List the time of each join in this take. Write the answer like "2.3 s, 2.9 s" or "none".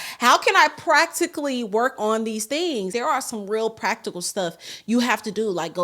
2.9 s